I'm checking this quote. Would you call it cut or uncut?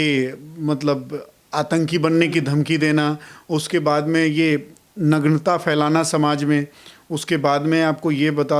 uncut